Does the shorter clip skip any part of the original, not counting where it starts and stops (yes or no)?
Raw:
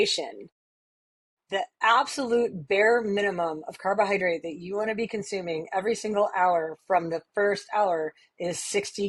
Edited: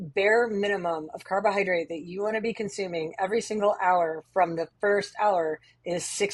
no